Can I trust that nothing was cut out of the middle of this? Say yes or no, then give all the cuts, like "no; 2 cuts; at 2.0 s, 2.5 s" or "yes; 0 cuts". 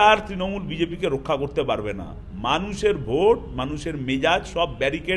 yes; 0 cuts